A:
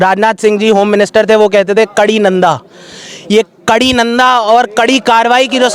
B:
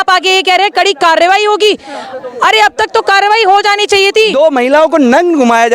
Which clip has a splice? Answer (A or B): B